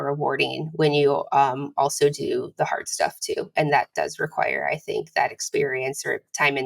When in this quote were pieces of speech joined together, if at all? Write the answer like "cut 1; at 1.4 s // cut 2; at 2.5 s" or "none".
none